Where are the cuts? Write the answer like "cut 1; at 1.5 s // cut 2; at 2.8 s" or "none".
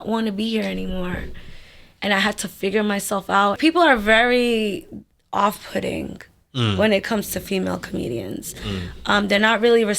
cut 1; at 3.6 s